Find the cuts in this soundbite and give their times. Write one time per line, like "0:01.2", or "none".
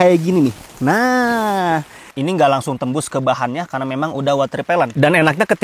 0:02.1